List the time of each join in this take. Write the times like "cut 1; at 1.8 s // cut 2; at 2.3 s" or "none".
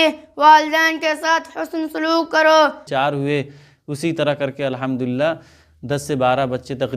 cut 1; at 2.8 s